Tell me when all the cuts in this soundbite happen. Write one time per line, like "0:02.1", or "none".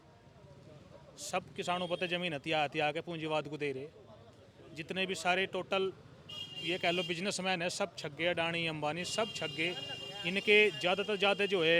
none